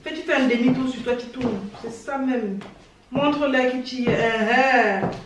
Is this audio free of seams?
yes; 0 cuts

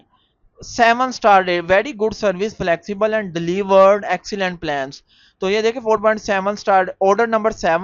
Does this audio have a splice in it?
no; 0 cuts

